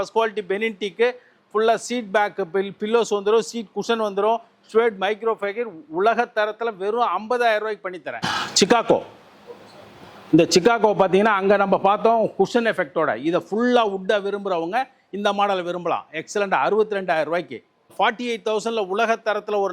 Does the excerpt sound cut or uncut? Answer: cut